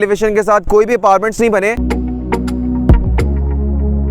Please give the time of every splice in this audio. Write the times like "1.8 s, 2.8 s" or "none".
1.8 s